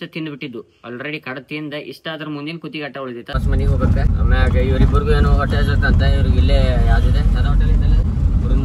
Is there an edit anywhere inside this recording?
yes; 2 cuts; at 3.3 s, 4.1 s

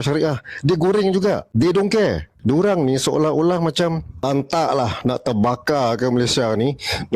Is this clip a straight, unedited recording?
no; 3 cuts; at 1.5 s, 2.3 s, 4.2 s

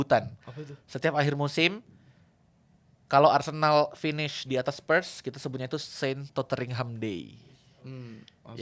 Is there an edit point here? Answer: no; 0 cuts

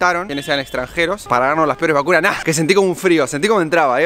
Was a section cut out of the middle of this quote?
yes; 1 cut; at 2.4 s

